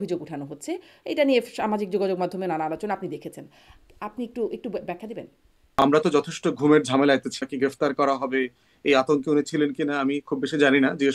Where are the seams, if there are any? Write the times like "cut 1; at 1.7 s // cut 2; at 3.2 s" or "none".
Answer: cut 1; at 5.6 s // cut 2; at 7.4 s